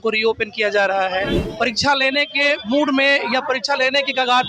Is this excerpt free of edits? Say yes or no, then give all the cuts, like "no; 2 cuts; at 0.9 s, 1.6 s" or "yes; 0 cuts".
no; 1 cut; at 1.4 s